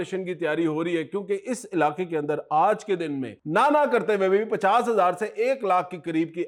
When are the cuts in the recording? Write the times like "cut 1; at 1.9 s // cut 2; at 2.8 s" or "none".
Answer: none